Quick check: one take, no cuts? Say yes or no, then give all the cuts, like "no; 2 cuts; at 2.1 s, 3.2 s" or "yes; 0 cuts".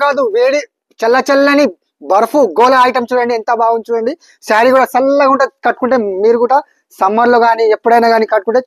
yes; 0 cuts